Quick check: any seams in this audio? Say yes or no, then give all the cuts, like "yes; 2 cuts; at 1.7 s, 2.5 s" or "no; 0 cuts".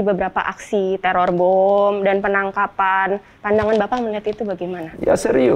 yes; 1 cut; at 3.3 s